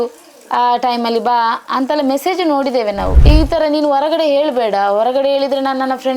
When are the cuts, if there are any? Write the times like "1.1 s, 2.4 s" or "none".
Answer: 3.1 s